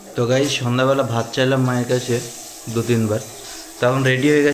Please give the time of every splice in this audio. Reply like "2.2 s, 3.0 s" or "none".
none